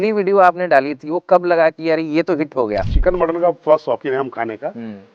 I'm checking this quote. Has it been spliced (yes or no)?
yes